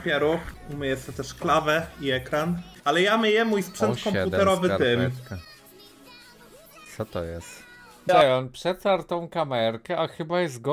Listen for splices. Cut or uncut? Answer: cut